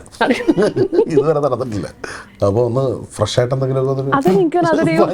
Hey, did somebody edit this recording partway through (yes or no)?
no